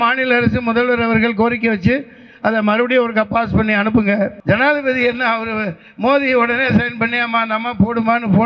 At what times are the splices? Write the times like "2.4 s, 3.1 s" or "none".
4.4 s